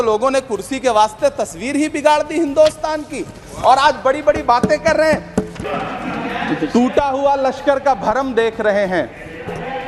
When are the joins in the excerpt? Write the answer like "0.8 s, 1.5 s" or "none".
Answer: 5.4 s